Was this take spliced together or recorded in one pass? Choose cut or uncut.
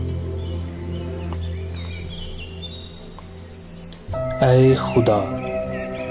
cut